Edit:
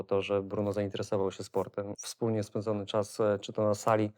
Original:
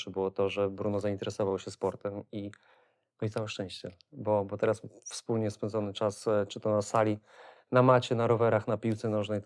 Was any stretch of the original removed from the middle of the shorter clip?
yes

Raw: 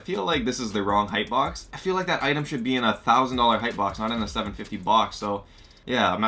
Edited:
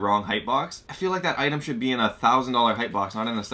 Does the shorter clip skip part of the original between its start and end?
no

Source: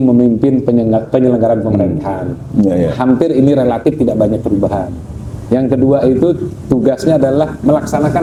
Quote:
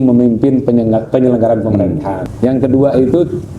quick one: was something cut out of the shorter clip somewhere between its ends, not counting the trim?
yes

